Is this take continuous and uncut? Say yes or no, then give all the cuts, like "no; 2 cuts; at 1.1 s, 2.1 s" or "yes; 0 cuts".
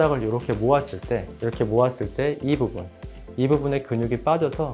yes; 0 cuts